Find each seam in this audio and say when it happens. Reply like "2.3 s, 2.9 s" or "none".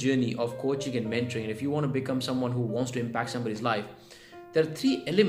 none